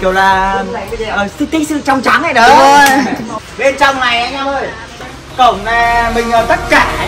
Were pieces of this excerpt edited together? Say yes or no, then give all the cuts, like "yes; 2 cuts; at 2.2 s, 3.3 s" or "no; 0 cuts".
yes; 1 cut; at 3.3 s